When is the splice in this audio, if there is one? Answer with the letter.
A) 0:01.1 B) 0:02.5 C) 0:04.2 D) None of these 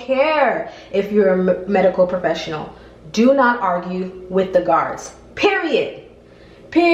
D